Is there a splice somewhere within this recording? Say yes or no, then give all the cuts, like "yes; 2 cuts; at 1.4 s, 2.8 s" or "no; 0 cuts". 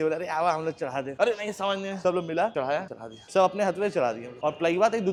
no; 0 cuts